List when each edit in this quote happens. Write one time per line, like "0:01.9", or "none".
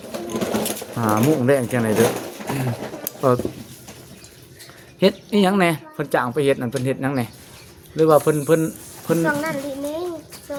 none